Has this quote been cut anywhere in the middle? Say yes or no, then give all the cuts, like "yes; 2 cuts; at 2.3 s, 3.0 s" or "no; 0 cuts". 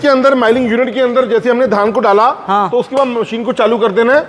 no; 0 cuts